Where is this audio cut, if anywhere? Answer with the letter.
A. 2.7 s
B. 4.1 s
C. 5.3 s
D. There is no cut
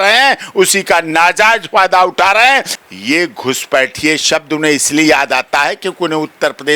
A